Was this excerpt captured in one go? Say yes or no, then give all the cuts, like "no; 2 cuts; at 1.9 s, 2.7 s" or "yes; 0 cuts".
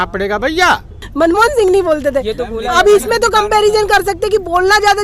no; 1 cut; at 1.0 s